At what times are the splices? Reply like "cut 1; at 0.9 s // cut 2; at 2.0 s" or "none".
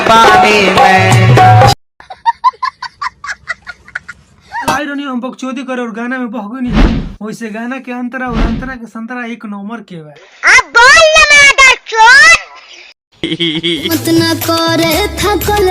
cut 1; at 4.7 s // cut 2; at 13.9 s